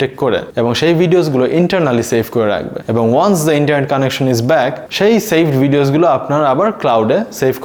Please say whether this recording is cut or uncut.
uncut